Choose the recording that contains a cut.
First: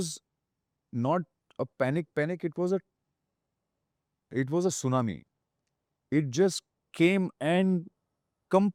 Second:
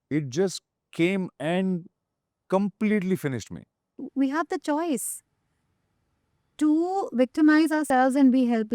second; 1 cut; at 4.1 s

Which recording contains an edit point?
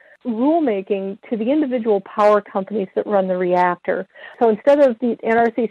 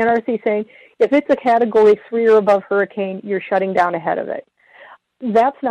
first; 1 cut; at 4.3 s

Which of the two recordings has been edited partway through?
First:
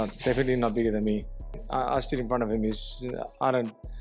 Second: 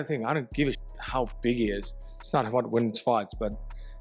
first; 1 cut; at 1.4 s

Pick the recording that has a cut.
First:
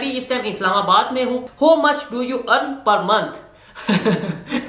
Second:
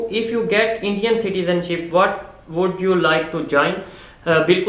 first; 1 cut; at 1.5 s

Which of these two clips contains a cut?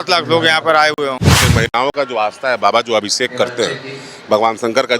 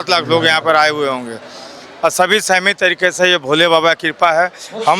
first; 1 cut; at 1.4 s

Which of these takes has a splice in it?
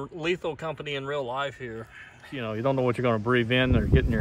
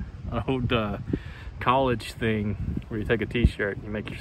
first; 1 cut; at 2.4 s

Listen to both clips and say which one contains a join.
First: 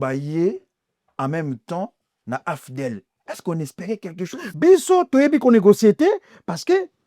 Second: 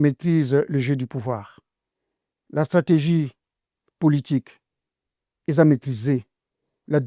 first; 1 cut; at 4.3 s

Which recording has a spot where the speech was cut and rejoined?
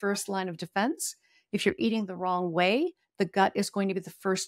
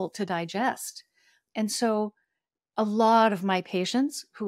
second; 1 cut; at 1.5 s

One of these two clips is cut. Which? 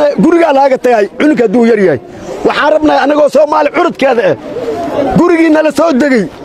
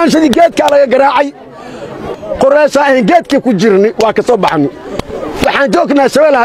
second; 1 cut; at 2.1 s

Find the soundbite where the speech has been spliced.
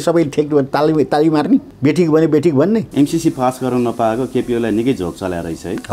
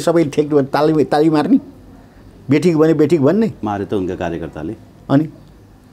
first; 2 cuts; at 1.7 s, 2.9 s

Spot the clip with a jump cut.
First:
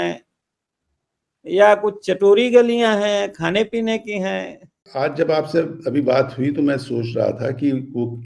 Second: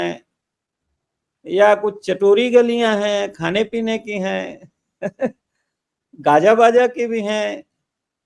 first; 1 cut; at 4.8 s

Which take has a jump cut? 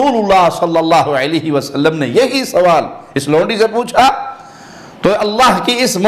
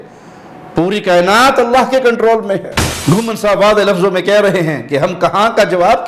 second; 1 cut; at 2.9 s

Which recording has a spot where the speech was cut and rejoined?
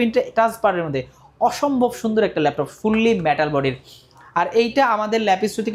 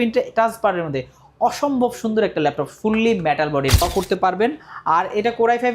second; 1 cut; at 3.8 s

